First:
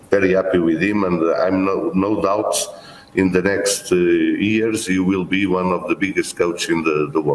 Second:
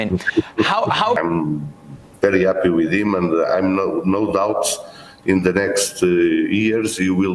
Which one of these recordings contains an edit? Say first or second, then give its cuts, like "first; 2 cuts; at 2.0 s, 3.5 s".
second; 1 cut; at 1.2 s